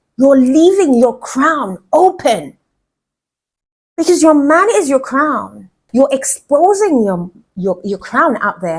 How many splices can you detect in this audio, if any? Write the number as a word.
one